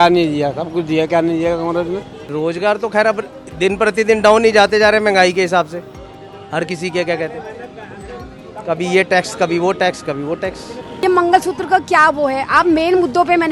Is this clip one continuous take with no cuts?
no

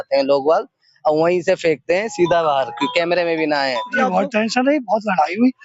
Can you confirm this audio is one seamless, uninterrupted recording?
no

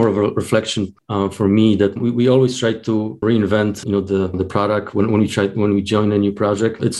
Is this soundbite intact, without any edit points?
no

